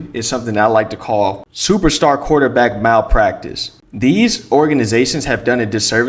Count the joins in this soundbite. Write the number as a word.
zero